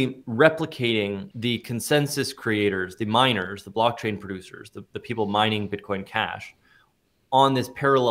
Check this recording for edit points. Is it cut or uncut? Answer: cut